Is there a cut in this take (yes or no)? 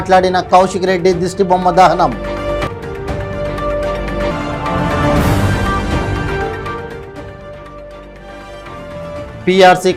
no